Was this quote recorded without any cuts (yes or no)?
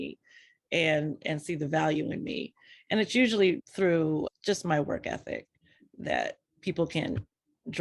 no